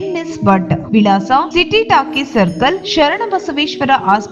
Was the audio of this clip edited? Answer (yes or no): no